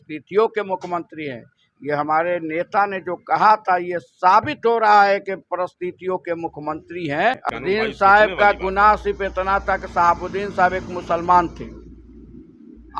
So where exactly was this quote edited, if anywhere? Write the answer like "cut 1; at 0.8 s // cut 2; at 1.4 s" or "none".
cut 1; at 7.5 s